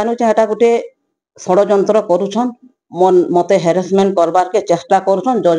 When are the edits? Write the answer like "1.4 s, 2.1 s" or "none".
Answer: none